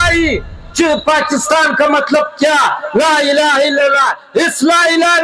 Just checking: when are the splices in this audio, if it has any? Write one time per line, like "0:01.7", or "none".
none